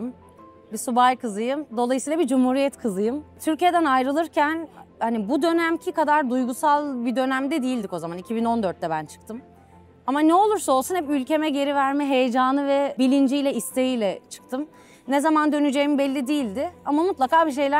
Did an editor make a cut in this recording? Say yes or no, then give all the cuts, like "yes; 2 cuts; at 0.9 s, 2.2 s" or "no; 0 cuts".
no; 0 cuts